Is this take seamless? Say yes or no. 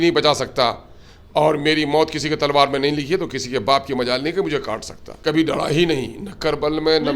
no